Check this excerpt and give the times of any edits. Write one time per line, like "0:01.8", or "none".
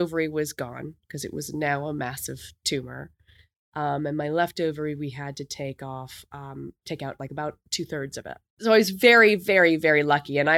0:08.6